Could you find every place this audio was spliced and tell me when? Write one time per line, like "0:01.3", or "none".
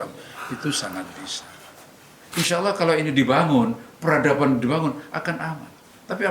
0:02.2